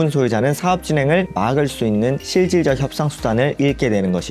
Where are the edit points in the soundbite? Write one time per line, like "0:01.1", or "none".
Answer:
none